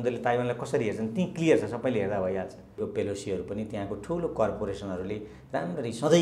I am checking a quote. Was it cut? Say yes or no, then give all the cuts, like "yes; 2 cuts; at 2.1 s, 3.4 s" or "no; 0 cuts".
yes; 1 cut; at 2.8 s